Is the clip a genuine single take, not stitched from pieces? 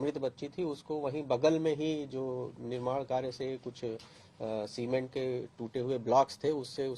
yes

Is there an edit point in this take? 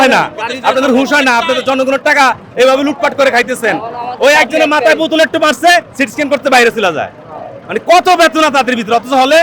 no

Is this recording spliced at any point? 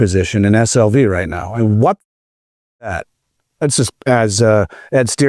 no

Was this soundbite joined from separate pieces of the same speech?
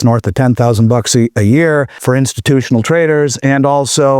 yes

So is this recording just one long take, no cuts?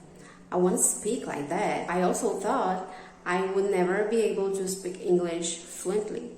no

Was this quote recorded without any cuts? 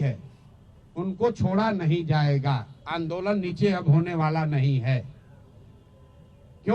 yes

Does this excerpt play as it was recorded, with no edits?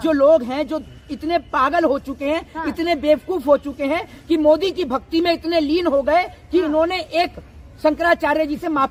yes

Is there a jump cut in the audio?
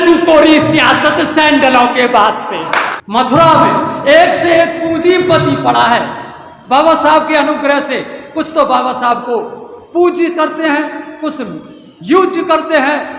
yes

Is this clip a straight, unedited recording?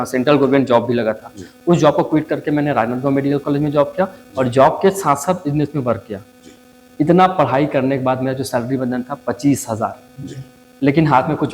yes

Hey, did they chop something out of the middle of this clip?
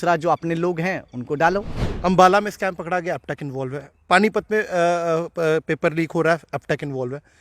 yes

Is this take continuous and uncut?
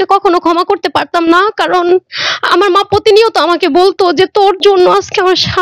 yes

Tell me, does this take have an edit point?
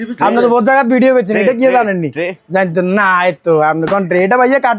no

